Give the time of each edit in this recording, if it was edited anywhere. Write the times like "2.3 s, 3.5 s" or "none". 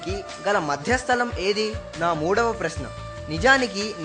1.8 s

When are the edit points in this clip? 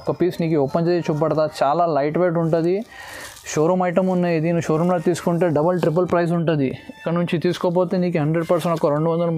none

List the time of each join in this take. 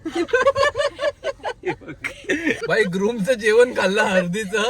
2.6 s

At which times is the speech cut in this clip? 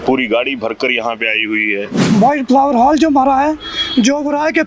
2.0 s

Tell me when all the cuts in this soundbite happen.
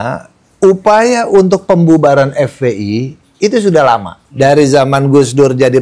4.2 s

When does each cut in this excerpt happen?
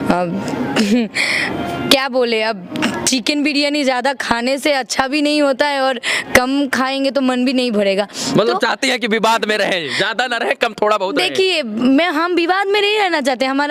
none

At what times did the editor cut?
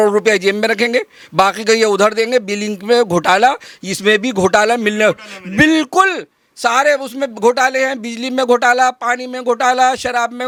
none

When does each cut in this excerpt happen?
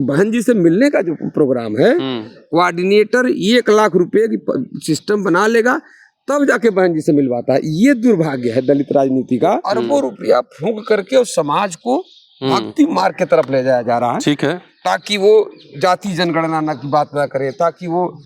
9.7 s

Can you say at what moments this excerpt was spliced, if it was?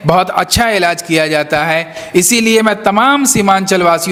none

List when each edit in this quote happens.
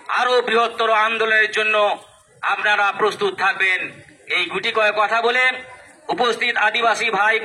none

